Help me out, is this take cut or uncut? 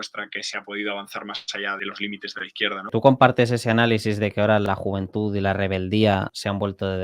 cut